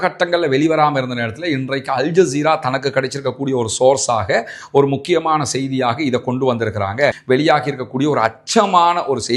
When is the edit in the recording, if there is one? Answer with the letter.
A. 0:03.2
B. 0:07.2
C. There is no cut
B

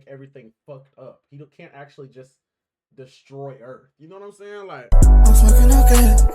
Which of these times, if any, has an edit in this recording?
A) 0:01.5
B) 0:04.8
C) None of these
B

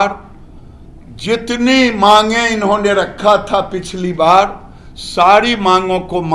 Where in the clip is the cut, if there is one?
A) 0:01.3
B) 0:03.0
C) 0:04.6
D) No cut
D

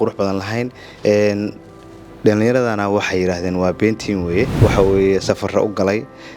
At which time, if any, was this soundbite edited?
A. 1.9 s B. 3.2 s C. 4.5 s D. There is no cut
C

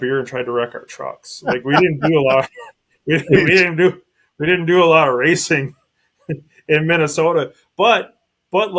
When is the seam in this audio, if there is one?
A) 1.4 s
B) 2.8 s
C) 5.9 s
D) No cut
D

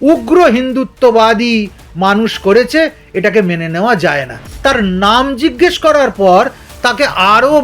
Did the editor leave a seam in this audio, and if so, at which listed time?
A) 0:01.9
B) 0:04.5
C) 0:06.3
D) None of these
B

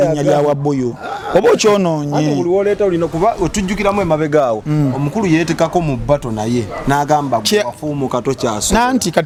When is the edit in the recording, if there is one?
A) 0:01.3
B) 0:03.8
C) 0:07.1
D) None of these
D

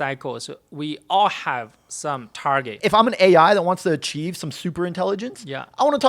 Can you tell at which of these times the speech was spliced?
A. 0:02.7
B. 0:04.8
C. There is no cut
A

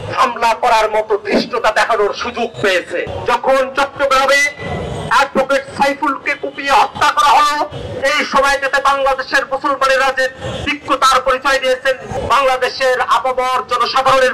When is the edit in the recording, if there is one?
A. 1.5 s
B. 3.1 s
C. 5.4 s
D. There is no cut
B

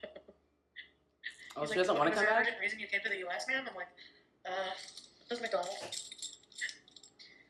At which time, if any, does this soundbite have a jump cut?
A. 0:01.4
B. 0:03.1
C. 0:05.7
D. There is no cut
D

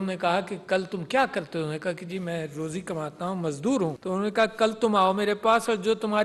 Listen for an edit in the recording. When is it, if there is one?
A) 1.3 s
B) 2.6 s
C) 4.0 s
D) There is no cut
C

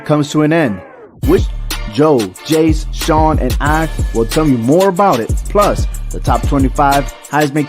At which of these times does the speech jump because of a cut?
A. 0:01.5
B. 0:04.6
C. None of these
A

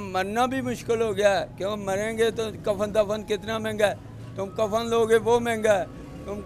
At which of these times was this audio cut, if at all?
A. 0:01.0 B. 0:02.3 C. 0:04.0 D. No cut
D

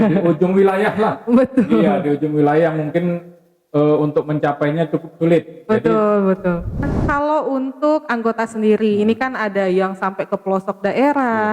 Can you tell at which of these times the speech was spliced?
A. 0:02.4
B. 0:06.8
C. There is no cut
B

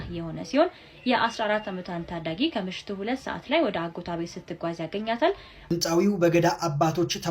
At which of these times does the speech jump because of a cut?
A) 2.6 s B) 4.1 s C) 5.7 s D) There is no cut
C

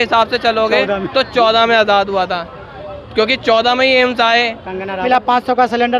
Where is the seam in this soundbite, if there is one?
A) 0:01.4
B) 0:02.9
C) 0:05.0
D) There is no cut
C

